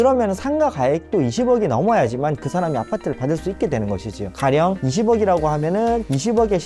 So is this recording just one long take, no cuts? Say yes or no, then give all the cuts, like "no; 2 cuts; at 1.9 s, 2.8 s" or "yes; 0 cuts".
no; 1 cut; at 4.3 s